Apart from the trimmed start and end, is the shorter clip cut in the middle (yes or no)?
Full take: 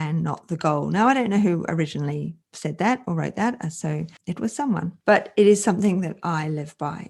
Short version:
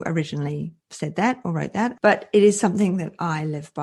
yes